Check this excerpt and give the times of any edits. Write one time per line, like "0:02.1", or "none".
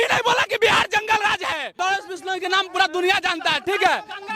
0:01.8